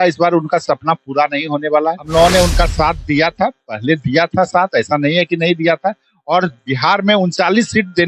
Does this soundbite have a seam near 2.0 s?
yes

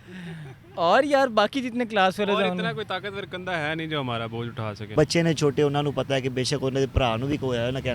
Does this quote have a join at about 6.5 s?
no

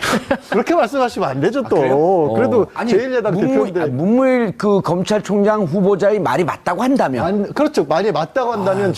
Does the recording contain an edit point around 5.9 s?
no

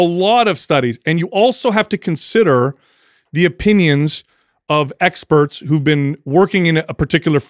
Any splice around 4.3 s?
no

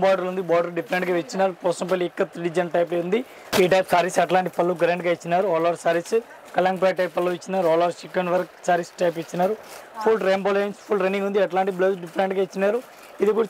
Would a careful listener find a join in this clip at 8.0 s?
no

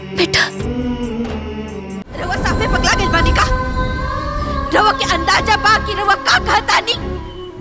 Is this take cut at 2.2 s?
yes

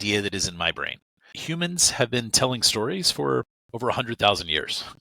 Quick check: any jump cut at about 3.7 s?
no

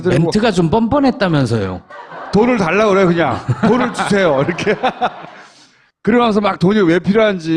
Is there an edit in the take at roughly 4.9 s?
no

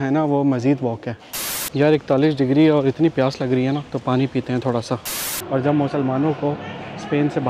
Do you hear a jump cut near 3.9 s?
yes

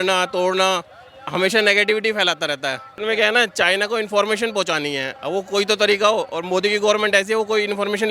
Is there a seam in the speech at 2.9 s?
yes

